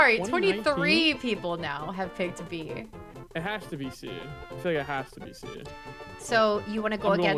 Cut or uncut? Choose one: cut